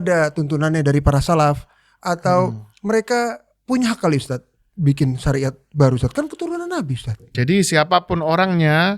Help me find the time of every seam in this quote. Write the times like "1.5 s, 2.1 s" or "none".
7.3 s